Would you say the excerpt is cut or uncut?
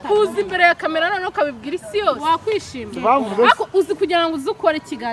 cut